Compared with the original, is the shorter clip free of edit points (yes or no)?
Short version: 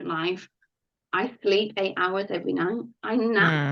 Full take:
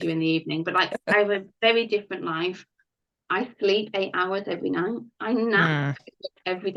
yes